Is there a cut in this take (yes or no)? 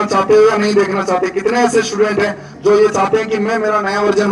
no